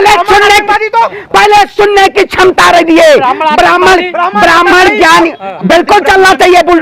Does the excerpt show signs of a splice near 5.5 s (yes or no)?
yes